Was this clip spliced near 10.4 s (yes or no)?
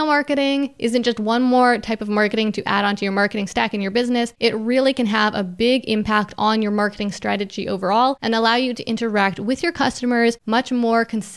yes